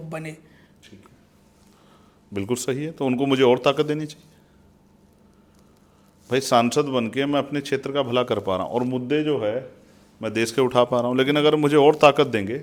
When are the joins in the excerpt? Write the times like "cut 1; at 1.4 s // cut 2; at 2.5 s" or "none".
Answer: none